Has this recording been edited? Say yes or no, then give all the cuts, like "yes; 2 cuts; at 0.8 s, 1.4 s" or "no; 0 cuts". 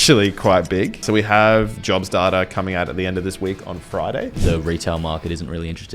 yes; 2 cuts; at 1.0 s, 4.4 s